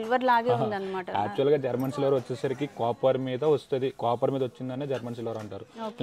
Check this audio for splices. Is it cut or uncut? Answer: uncut